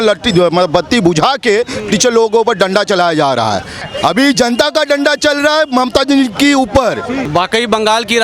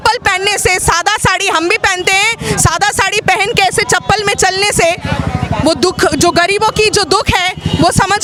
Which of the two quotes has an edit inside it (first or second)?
first